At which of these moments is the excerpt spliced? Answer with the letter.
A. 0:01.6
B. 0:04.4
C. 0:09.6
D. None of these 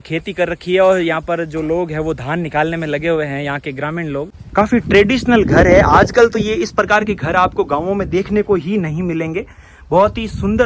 B